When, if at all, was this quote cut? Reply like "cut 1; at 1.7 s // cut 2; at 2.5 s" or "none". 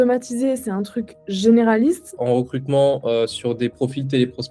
cut 1; at 2.2 s